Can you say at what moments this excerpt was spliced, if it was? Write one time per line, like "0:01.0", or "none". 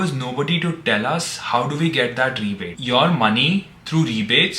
0:02.8